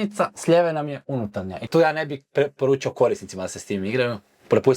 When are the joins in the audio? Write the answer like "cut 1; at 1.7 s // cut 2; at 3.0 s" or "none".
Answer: cut 1; at 1.6 s

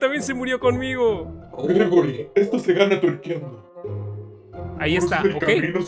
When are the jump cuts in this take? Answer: cut 1; at 4.8 s

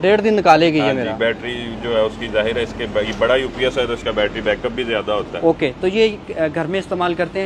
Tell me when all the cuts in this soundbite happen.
none

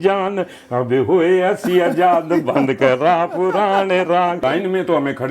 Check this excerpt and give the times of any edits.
cut 1; at 4.4 s

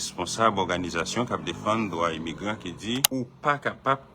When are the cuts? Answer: cut 1; at 3.1 s

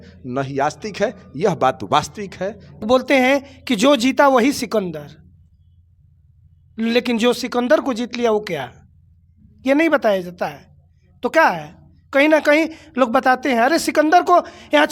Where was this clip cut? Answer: cut 1; at 2.8 s

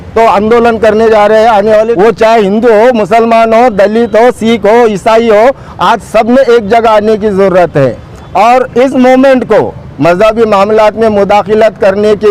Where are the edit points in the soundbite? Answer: cut 1; at 1.9 s

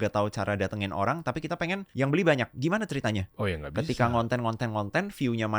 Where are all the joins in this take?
cut 1; at 1.9 s // cut 2; at 3.3 s

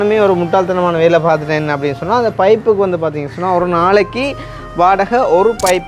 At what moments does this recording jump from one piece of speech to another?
none

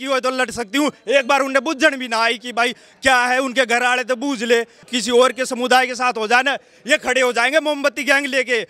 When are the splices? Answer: cut 1; at 4.8 s

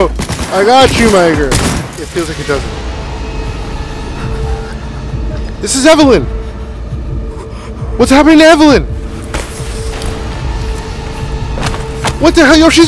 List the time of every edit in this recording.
cut 1; at 1.8 s

